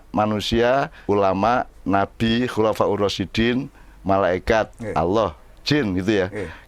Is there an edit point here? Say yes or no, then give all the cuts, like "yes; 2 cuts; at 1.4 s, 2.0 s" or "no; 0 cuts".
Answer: yes; 1 cut; at 0.9 s